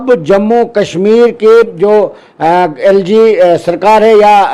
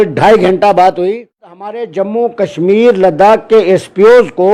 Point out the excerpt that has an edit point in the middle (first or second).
second